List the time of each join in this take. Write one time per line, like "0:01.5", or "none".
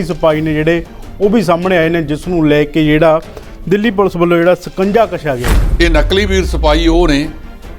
0:05.6